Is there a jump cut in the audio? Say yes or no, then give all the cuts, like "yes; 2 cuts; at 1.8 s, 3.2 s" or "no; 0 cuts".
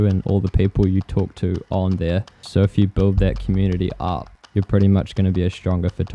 yes; 2 cuts; at 2.4 s, 4.3 s